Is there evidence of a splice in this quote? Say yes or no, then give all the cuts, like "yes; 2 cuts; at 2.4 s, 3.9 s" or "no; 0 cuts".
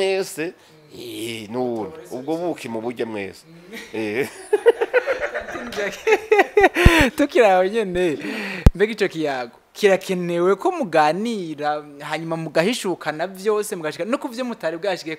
no; 0 cuts